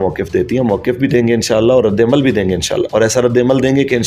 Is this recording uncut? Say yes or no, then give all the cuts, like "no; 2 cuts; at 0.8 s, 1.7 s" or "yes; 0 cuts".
yes; 0 cuts